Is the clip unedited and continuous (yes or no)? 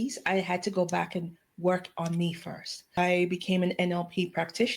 no